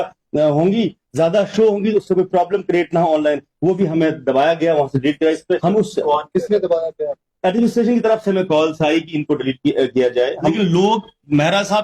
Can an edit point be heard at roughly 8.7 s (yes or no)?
no